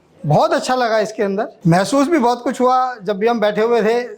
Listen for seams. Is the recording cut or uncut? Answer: cut